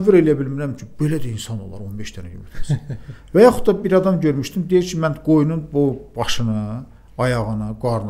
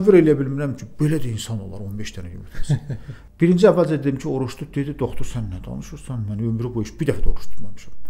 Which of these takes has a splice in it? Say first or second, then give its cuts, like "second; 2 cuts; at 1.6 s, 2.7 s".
second; 1 cut; at 3.1 s